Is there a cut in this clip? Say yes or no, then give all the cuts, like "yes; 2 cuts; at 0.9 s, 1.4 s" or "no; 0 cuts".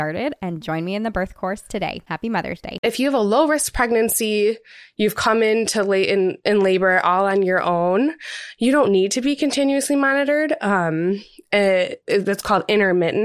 yes; 1 cut; at 2.8 s